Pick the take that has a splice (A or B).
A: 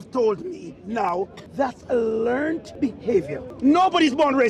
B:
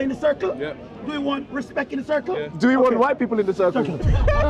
A